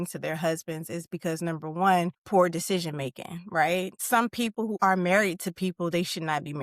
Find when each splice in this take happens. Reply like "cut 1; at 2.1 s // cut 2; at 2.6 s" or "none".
cut 1; at 2.2 s // cut 2; at 4.4 s